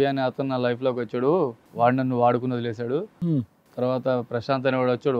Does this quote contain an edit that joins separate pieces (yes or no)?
no